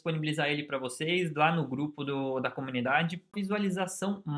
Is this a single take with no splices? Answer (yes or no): no